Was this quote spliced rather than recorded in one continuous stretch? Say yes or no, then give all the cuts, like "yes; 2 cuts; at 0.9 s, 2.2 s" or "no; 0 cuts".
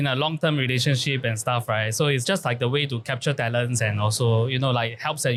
no; 0 cuts